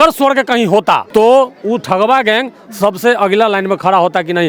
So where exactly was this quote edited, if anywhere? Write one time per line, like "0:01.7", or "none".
none